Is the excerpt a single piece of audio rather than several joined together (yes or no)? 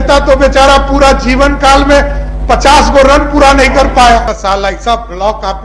no